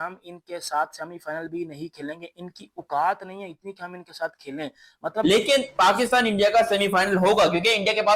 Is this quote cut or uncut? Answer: cut